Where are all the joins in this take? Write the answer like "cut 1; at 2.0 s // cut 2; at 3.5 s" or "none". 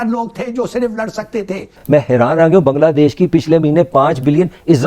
cut 1; at 1.7 s